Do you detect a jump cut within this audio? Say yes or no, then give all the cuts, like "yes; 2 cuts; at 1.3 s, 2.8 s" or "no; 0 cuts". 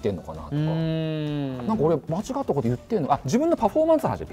no; 0 cuts